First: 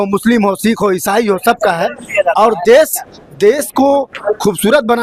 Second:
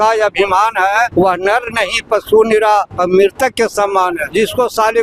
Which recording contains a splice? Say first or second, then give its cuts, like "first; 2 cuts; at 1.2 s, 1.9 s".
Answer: second; 3 cuts; at 1.1 s, 2.9 s, 4.2 s